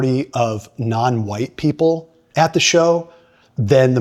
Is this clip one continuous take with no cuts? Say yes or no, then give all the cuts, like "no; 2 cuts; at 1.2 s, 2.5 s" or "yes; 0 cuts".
yes; 0 cuts